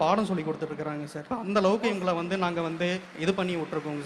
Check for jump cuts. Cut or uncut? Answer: cut